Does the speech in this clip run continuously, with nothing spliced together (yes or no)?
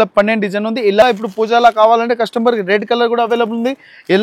no